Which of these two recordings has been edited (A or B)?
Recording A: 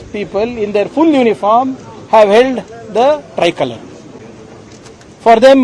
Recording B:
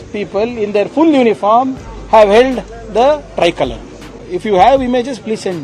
B